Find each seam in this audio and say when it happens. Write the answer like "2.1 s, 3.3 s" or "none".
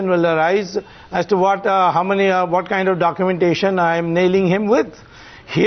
3.1 s